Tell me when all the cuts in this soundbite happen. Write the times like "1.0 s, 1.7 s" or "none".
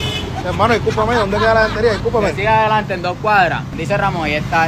3.7 s